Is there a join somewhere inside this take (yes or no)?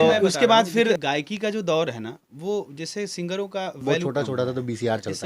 yes